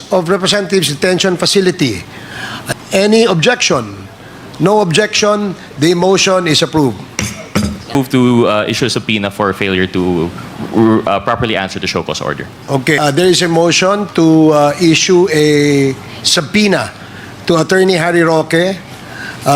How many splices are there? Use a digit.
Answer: 3